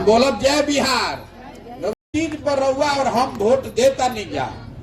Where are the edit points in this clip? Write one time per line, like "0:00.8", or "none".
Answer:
0:02.0